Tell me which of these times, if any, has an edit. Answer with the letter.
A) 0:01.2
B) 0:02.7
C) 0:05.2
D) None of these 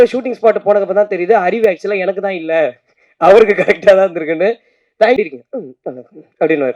C